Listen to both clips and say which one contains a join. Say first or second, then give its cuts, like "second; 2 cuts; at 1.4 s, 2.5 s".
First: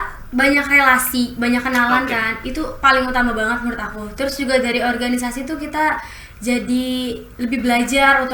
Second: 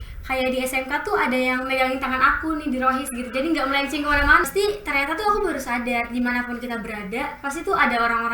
second; 1 cut; at 4.5 s